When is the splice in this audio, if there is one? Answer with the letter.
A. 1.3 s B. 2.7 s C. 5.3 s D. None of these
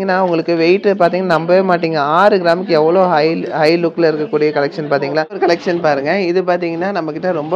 C